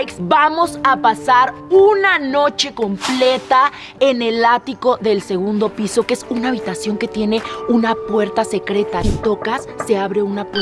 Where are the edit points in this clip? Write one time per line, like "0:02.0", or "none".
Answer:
0:09.0